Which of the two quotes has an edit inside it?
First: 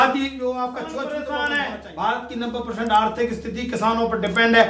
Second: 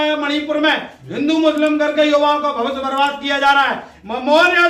first; 1 cut; at 1.0 s

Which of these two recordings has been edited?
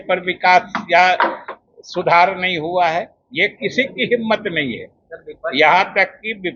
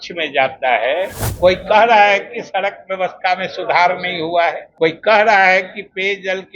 second; 2 cuts; at 1.2 s, 4.7 s

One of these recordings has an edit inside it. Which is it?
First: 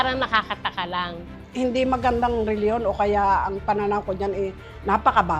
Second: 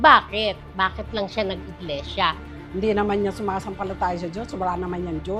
first; 1 cut; at 1.2 s

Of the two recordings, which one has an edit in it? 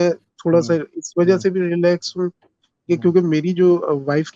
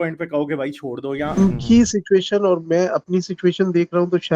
second; 1 cut; at 1.4 s

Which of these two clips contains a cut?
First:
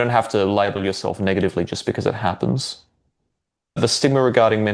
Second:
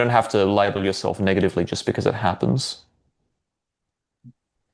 first; 1 cut; at 3.8 s

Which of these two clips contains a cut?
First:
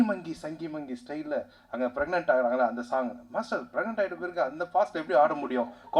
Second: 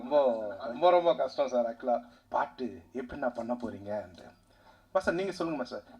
second; 1 cut; at 2.2 s

